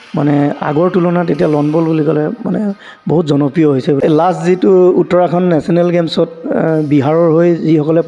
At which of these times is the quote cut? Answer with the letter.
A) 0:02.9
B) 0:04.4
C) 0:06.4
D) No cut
B